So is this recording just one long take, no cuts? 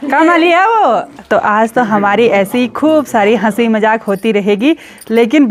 yes; 0 cuts

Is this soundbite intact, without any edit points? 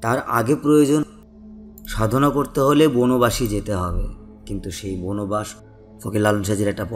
no; 2 cuts; at 1.2 s, 5.6 s

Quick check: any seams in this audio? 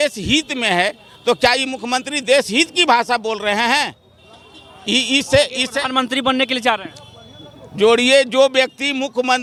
no; 0 cuts

